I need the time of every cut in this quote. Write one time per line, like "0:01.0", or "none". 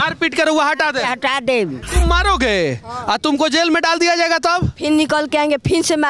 0:01.8